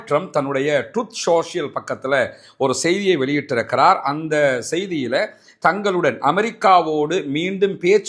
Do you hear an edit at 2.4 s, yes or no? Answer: no